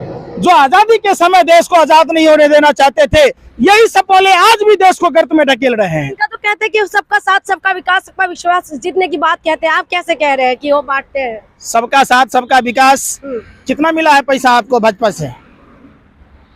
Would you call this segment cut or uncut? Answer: uncut